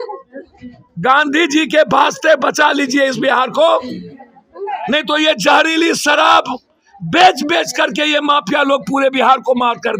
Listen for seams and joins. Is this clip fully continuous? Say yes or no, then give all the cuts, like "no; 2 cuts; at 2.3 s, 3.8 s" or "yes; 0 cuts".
yes; 0 cuts